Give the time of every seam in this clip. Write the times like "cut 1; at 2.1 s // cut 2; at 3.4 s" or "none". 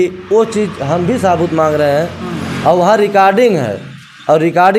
none